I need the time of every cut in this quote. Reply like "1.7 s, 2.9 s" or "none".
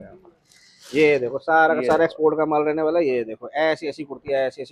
none